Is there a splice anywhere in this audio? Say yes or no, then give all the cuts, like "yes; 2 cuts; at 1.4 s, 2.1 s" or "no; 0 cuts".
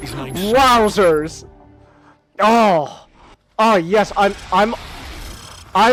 no; 0 cuts